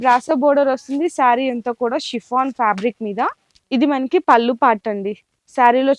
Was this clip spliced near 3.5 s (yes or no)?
yes